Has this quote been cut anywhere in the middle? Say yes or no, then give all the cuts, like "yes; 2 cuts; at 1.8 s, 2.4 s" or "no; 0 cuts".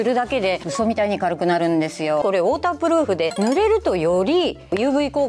yes; 2 cuts; at 2.2 s, 3.3 s